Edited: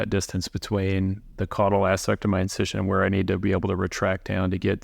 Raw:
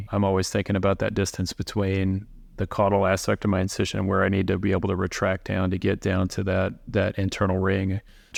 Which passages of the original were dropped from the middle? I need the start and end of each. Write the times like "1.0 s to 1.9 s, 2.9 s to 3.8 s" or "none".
2.3 s to 2.5 s